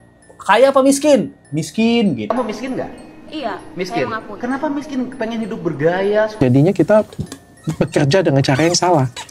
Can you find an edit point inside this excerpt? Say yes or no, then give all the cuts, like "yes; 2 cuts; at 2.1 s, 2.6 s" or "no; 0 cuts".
yes; 2 cuts; at 2.3 s, 6.4 s